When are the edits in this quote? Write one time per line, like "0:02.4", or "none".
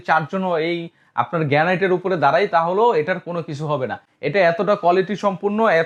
none